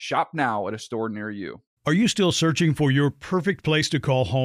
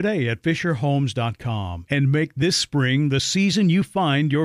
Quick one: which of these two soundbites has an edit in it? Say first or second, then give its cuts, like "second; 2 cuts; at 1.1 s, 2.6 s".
first; 1 cut; at 1.6 s